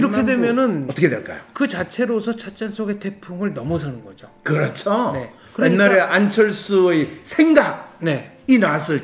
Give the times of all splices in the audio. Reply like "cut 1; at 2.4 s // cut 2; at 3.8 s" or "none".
none

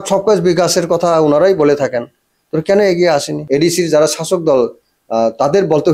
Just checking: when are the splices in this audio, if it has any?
cut 1; at 3.3 s

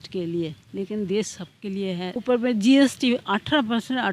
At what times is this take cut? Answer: cut 1; at 2.1 s

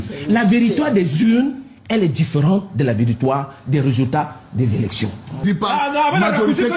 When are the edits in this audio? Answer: cut 1; at 5.4 s

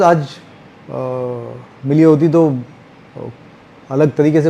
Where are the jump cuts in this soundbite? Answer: none

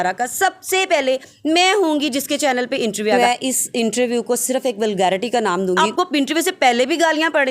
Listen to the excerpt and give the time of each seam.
cut 1; at 3.1 s // cut 2; at 5.8 s

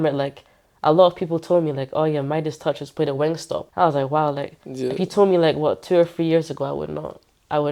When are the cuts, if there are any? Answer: cut 1; at 3.7 s

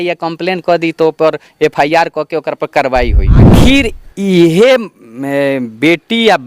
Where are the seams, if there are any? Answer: cut 1; at 3.5 s

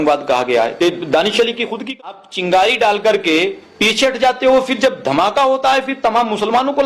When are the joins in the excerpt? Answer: cut 1; at 2.1 s

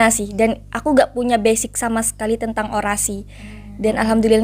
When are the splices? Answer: none

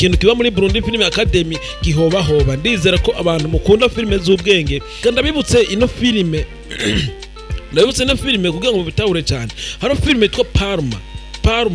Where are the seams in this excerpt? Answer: cut 1; at 4.8 s

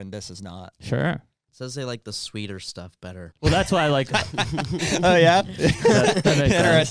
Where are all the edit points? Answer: cut 1; at 1.4 s // cut 2; at 3.3 s

